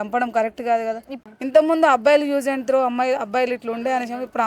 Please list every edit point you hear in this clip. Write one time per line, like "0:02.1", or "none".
0:01.1